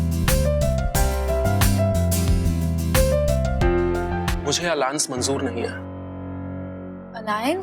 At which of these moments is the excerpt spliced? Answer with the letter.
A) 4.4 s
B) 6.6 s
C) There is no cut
A